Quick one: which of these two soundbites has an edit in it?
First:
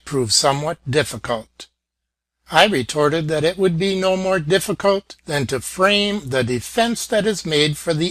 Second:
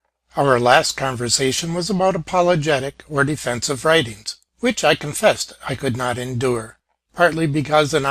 second; 1 cut; at 6.6 s

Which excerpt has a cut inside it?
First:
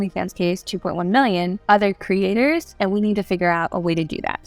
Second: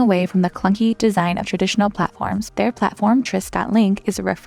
first; 2 cuts; at 1.6 s, 2.7 s

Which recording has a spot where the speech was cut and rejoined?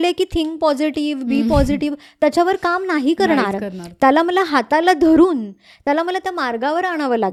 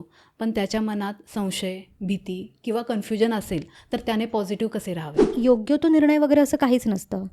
second; 1 cut; at 5.3 s

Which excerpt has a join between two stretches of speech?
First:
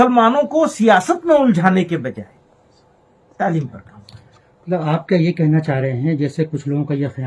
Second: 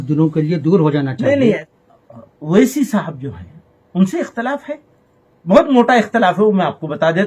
second; 2 cuts; at 1.6 s, 6.2 s

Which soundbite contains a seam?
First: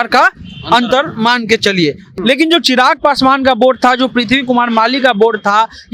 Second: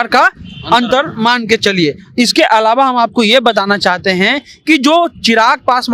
first; 1 cut; at 2.1 s

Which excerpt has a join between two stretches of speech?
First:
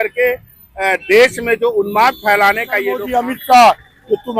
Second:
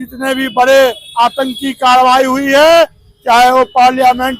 first; 1 cut; at 3.1 s

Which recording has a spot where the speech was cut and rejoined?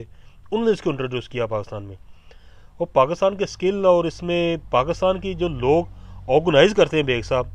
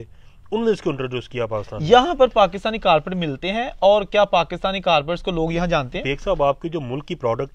second; 2 cuts; at 1.7 s, 6.0 s

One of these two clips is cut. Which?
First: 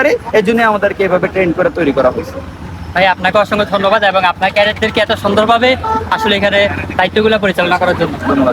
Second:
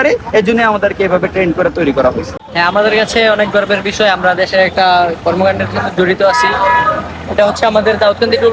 second; 1 cut; at 2.4 s

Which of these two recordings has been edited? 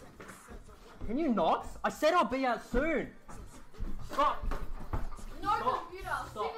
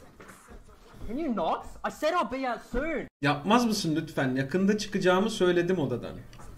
first; 2 cuts; at 3.1 s, 5.0 s

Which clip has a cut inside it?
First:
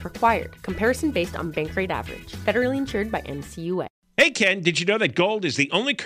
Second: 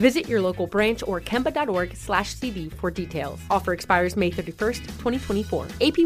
first; 1 cut; at 4.0 s

